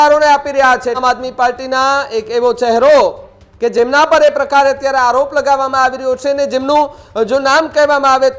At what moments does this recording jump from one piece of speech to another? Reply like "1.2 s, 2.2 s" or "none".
1.0 s